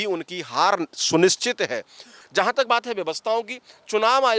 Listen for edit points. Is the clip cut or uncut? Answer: cut